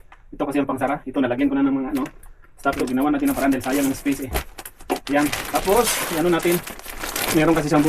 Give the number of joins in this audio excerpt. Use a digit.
1